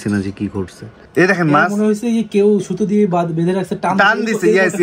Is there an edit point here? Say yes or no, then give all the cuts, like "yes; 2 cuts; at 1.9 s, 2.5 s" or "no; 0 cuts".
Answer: yes; 1 cut; at 1.0 s